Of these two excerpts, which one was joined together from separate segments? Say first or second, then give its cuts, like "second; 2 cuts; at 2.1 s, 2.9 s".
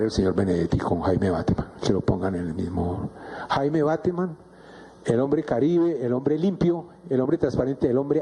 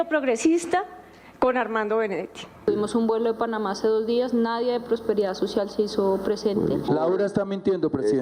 second; 2 cuts; at 2.4 s, 6.9 s